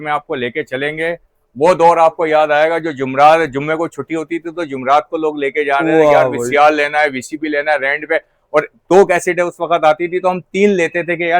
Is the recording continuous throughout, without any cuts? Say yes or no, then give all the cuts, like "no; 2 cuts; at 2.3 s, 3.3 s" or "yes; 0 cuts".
yes; 0 cuts